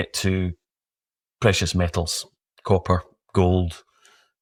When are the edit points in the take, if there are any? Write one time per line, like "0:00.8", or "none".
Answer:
none